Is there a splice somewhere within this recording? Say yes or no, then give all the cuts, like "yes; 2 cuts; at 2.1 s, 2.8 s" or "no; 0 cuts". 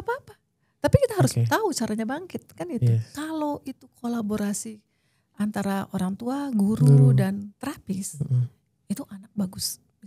yes; 1 cut; at 3.1 s